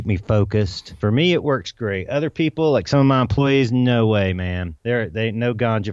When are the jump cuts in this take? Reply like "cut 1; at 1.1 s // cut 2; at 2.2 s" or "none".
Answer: cut 1; at 0.9 s // cut 2; at 4.7 s